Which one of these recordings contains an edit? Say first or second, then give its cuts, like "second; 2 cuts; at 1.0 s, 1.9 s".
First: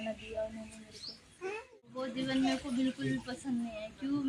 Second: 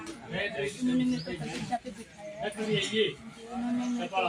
first; 1 cut; at 2.1 s